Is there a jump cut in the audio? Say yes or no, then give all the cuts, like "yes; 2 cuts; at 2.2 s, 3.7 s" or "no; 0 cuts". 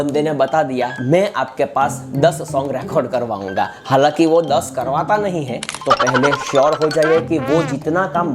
yes; 2 cuts; at 1.0 s, 5.7 s